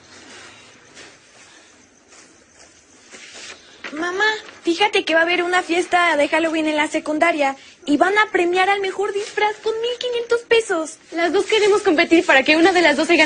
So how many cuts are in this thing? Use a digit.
0